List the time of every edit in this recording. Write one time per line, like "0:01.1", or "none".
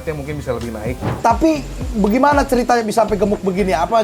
0:01.0